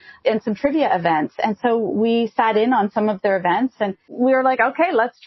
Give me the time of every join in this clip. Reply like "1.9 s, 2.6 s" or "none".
4.1 s